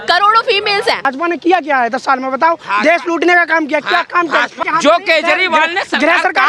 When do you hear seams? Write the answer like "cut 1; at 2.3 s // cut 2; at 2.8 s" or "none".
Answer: cut 1; at 1.1 s // cut 2; at 4.6 s